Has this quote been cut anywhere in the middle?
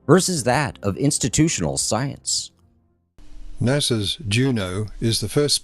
yes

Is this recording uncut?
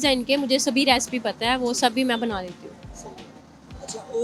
yes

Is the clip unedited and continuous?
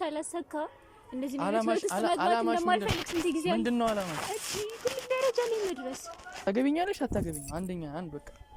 no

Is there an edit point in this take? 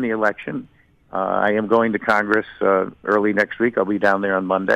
no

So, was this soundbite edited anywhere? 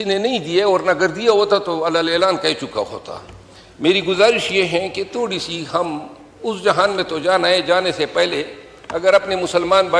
no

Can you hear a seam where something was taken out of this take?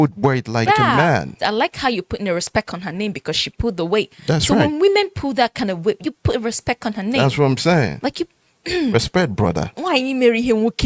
yes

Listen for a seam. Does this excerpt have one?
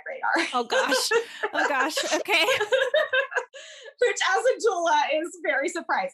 no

